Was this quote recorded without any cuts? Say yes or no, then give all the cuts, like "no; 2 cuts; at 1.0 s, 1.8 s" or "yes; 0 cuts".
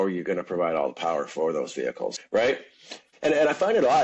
no; 2 cuts; at 2.2 s, 3.0 s